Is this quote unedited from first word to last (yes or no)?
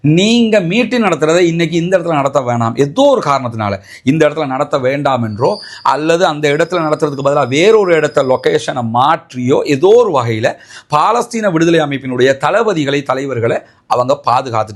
yes